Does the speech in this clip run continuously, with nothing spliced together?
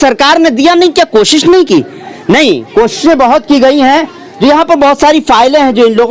yes; 0 cuts

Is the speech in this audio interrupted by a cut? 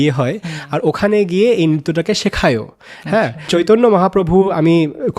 yes; 1 cut; at 3.5 s

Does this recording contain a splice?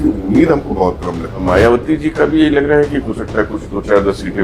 yes; 1 cut; at 1.4 s

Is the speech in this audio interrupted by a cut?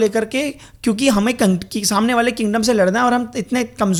no; 0 cuts

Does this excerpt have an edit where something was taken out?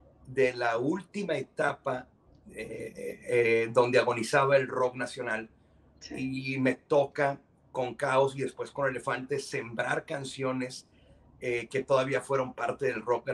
no; 0 cuts

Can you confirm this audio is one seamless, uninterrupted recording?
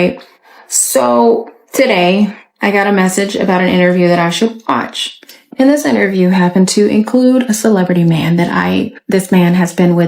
no; 1 cut; at 9.0 s

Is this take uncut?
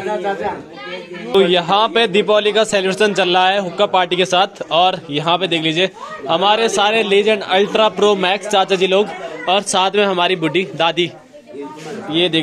no; 1 cut; at 1.3 s

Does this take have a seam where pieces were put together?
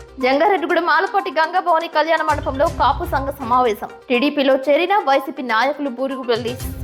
no; 0 cuts

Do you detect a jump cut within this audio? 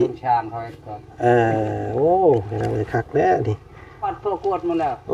yes; 1 cut; at 4.1 s

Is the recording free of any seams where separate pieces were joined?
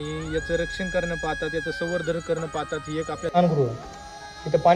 no; 1 cut; at 3.3 s

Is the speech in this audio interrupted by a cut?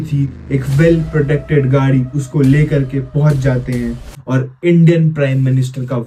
no; 0 cuts

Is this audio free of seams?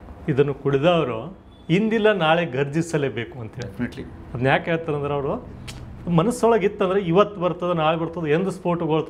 yes; 0 cuts

